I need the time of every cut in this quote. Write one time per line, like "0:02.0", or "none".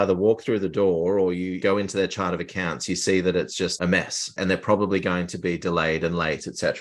0:03.7